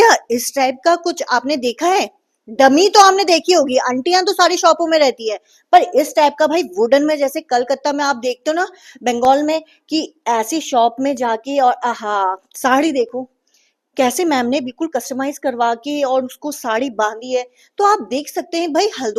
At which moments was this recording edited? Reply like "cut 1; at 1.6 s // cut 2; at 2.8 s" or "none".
none